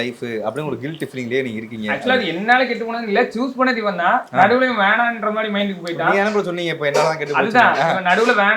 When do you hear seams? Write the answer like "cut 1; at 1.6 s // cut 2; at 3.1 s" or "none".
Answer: none